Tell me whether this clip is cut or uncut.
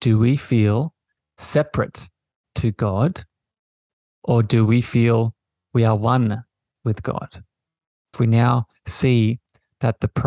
cut